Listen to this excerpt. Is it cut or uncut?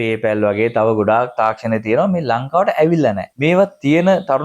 cut